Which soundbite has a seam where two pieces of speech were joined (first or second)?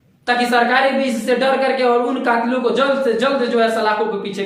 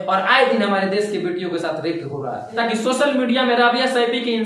second